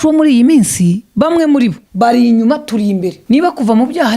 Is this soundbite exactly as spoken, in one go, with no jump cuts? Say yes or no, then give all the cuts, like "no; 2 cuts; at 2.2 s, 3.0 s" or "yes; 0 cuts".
no; 3 cuts; at 1.0 s, 1.8 s, 3.2 s